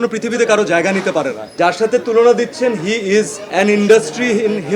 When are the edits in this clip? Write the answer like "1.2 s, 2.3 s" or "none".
1.6 s, 3.5 s